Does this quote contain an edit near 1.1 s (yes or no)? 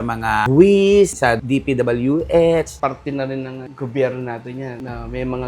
yes